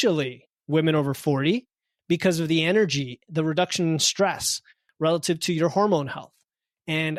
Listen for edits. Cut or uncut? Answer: uncut